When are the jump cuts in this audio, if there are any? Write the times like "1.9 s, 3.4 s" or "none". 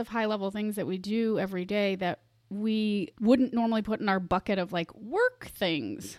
3.1 s

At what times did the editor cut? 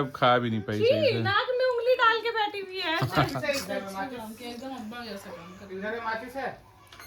none

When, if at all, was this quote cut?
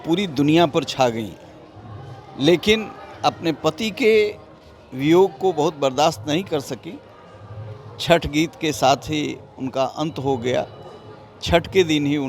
none

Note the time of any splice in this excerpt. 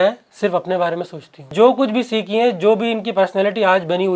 1.5 s

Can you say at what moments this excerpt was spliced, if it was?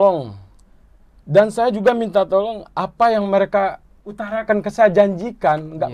none

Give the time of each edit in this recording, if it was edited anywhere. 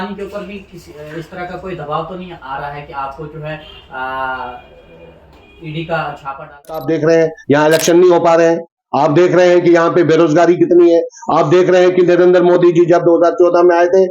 6.8 s

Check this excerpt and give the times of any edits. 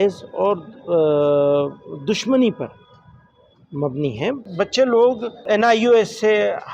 4.4 s, 5.4 s

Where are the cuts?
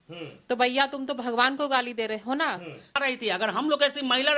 3.0 s

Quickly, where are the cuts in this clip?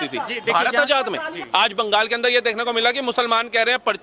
1.4 s

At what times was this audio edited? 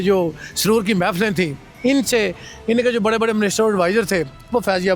1.6 s

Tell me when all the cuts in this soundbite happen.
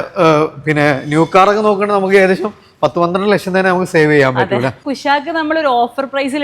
4.9 s

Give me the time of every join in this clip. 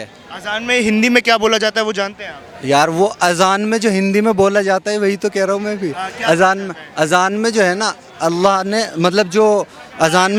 none

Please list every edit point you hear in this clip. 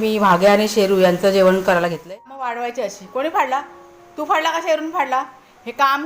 2.0 s

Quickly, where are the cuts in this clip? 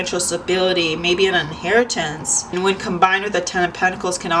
2.4 s

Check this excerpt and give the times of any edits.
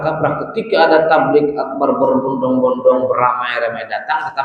none

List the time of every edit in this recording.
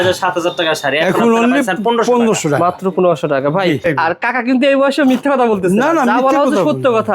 3.8 s

